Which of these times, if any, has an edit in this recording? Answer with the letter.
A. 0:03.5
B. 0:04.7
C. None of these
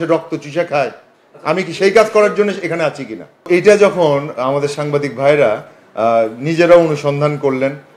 A